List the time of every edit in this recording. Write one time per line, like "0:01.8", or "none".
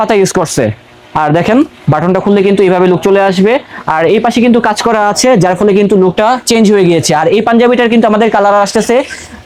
none